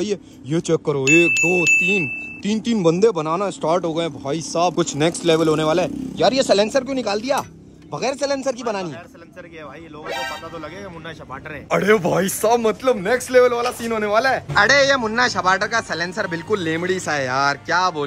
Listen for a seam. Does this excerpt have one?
no; 0 cuts

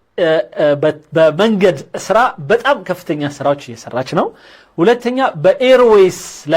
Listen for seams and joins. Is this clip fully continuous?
yes; 0 cuts

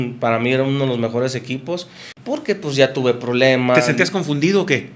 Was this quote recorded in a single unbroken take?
no; 1 cut; at 2.1 s

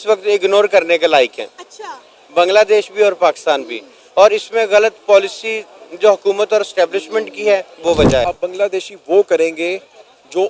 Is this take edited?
yes; 1 cut; at 8.2 s

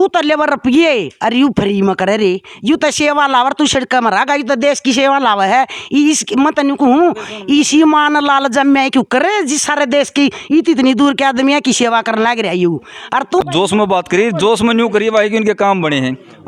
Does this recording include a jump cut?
no; 0 cuts

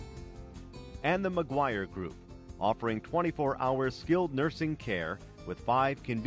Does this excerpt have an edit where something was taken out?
yes; 1 cut; at 1.0 s

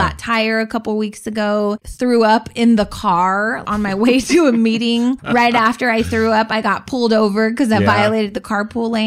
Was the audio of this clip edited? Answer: yes; 3 cuts; at 1.9 s, 3.6 s, 5.2 s

